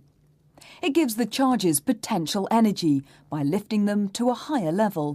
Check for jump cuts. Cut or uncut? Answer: cut